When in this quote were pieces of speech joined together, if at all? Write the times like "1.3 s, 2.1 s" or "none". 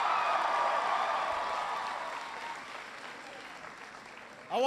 none